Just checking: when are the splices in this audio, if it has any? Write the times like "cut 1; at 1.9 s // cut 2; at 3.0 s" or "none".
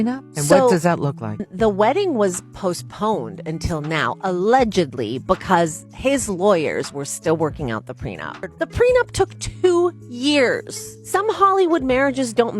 cut 1; at 1.5 s // cut 2; at 8.5 s